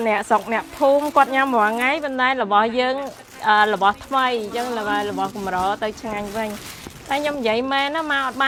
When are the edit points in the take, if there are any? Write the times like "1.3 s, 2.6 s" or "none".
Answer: none